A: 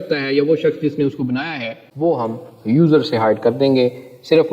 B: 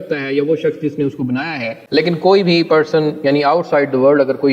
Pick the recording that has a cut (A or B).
A